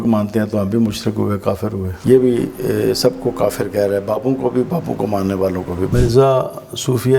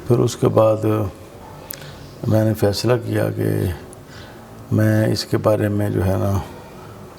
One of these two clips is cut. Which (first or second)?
first